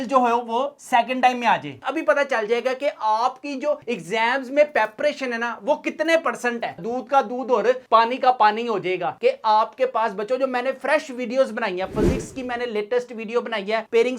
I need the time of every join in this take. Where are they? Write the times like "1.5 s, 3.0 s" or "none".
1.8 s, 6.8 s, 9.1 s